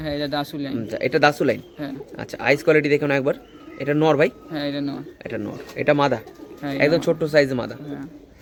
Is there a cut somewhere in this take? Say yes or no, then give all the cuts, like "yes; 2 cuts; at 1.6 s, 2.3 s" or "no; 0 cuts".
no; 0 cuts